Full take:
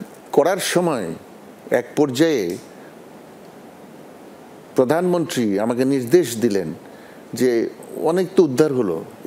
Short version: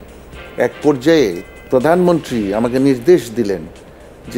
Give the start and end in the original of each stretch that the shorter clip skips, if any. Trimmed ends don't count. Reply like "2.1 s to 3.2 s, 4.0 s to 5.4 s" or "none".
2.6 s to 4.6 s

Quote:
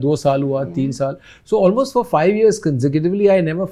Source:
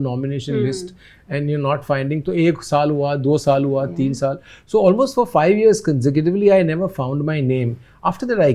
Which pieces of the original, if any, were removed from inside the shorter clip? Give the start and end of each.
none

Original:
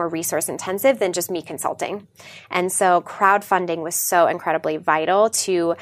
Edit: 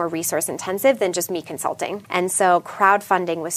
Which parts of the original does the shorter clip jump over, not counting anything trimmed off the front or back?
2.0 s to 2.4 s

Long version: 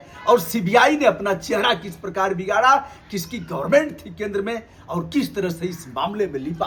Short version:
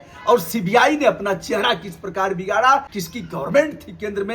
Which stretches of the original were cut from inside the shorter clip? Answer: 3.0 s to 3.2 s

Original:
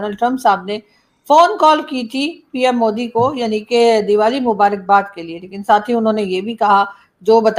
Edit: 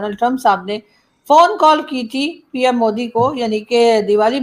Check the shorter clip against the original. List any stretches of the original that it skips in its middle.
none

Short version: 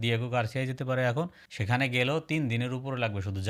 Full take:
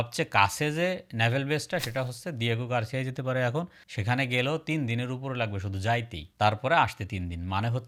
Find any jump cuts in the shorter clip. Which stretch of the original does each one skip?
none

